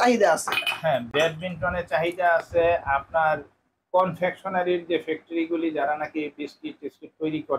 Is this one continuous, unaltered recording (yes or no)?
yes